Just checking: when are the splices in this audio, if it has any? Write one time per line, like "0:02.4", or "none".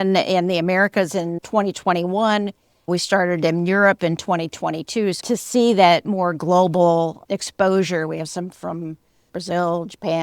0:01.3
0:05.2